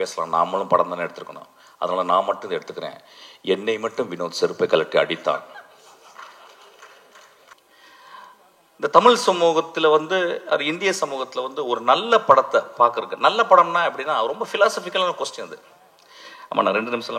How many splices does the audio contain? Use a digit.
1